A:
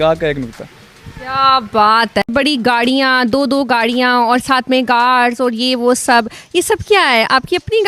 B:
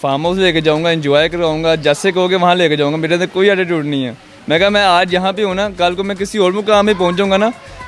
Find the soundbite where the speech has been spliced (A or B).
A